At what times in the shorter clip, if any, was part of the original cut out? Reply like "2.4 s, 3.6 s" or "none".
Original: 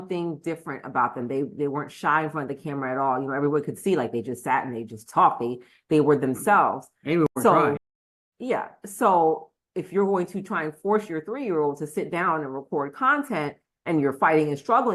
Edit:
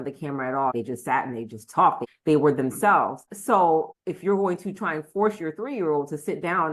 0.7 s, 2.1 s, 3.3 s, 4.0 s